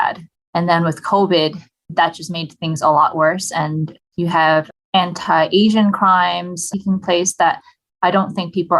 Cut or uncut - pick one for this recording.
cut